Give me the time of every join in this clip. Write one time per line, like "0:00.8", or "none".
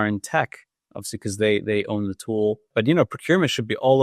0:02.7